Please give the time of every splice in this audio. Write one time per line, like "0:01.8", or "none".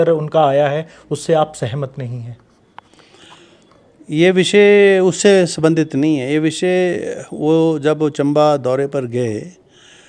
none